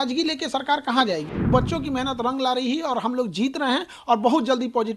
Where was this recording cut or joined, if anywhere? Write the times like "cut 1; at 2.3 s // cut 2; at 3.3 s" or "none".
cut 1; at 1.5 s